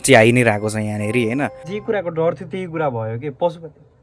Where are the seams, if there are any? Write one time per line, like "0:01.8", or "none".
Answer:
0:01.7